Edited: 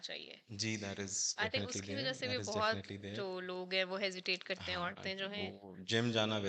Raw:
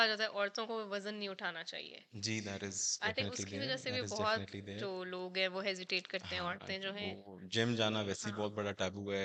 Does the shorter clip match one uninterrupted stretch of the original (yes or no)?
yes